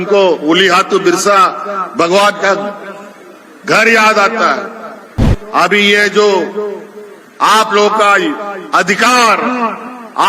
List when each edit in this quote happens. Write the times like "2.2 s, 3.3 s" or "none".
5.4 s